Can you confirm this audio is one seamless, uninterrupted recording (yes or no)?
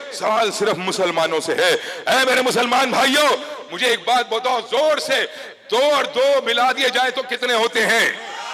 yes